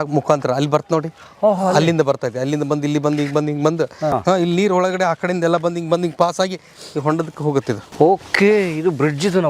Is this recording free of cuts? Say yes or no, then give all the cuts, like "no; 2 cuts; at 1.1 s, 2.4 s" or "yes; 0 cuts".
no; 2 cuts; at 4.2 s, 7.9 s